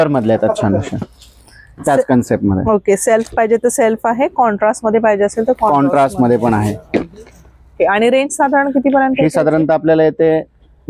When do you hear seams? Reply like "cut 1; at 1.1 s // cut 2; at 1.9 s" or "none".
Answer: none